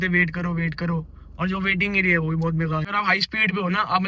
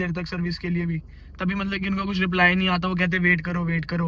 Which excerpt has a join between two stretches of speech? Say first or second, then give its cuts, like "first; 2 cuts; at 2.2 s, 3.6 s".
first; 1 cut; at 2.8 s